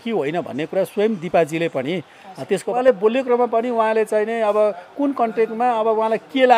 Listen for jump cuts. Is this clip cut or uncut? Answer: cut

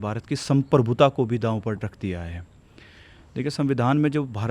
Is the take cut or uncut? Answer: uncut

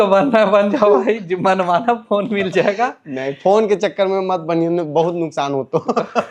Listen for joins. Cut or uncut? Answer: uncut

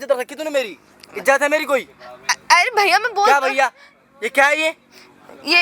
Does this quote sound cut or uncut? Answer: uncut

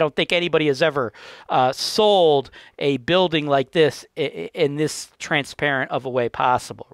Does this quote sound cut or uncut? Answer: uncut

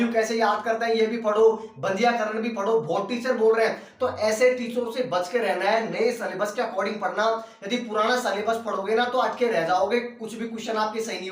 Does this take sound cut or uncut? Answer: uncut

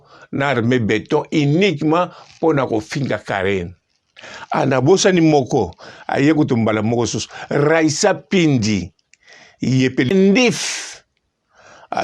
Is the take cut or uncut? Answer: cut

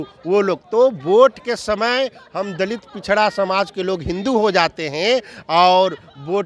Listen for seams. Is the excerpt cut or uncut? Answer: uncut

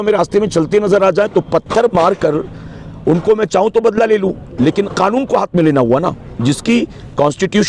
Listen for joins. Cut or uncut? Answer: uncut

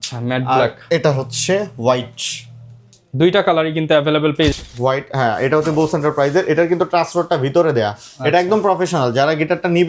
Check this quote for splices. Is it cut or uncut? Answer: cut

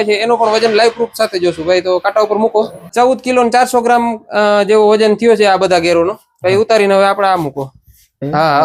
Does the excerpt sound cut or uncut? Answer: uncut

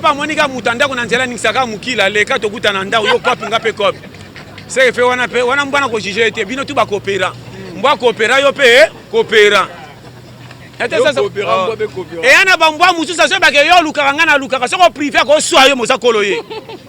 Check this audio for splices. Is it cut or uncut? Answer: uncut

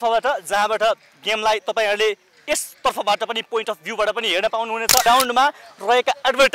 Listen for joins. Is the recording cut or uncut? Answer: cut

